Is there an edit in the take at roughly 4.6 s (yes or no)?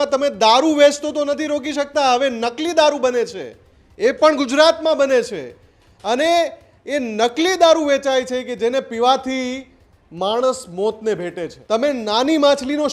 no